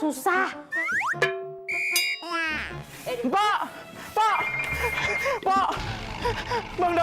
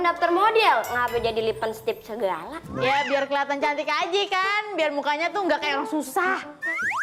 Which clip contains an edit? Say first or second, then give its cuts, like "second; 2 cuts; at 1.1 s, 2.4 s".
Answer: first; 1 cut; at 2.9 s